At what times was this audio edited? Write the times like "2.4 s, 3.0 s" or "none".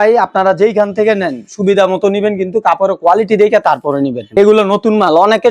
4.4 s